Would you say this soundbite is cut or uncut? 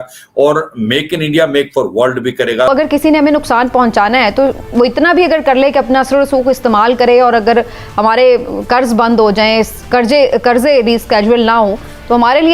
cut